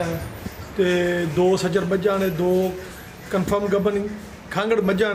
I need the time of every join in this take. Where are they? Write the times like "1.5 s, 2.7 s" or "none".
none